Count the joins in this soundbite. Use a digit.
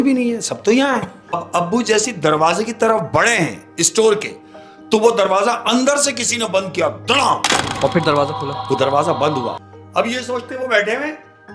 2